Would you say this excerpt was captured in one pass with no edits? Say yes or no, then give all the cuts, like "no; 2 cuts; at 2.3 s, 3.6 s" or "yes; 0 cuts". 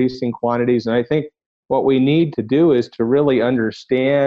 no; 1 cut; at 2.3 s